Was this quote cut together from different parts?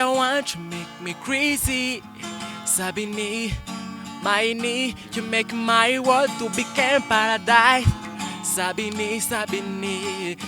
no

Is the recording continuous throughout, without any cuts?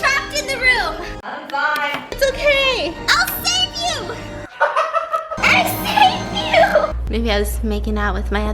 no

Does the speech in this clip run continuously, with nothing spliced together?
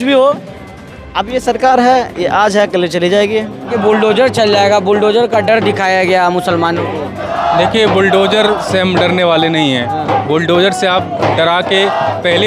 no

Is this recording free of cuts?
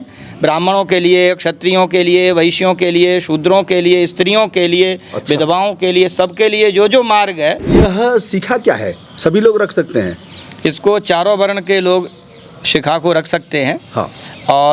no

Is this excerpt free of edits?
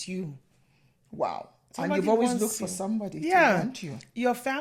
yes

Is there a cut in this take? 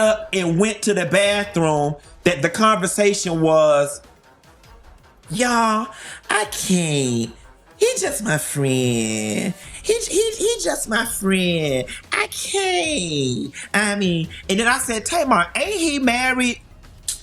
no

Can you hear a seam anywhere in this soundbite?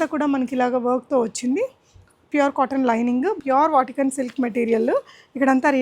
yes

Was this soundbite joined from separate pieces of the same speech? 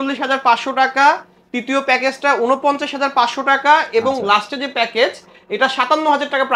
no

